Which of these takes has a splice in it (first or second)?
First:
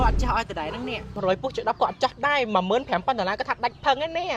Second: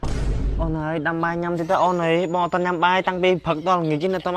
first